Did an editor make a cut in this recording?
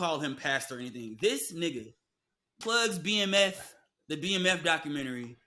yes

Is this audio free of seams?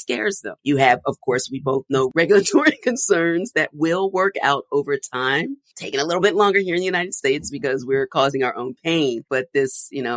no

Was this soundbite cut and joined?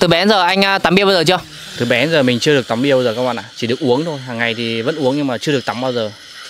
no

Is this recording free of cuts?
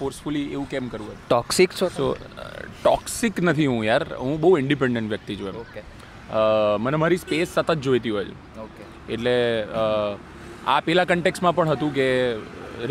yes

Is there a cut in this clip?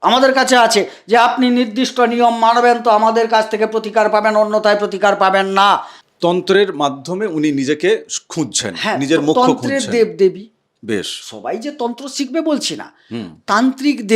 yes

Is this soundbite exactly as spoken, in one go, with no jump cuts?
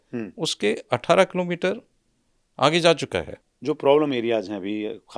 no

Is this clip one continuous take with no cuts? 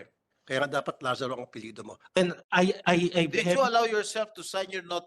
no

